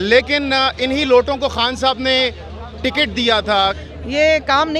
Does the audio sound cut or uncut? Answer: cut